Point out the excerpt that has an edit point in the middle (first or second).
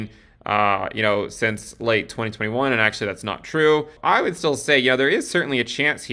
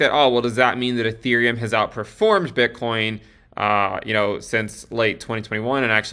first